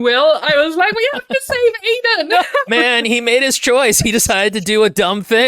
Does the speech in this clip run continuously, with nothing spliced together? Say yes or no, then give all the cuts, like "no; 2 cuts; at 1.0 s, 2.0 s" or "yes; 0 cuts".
no; 1 cut; at 2.7 s